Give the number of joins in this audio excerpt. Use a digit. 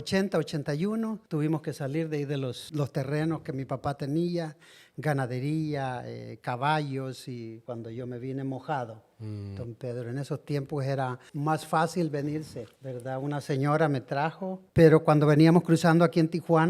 1